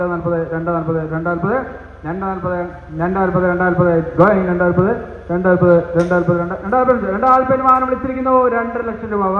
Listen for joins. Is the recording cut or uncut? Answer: uncut